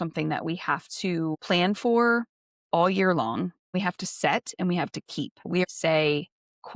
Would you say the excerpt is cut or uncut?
cut